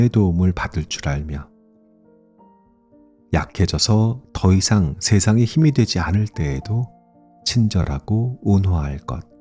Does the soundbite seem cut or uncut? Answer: uncut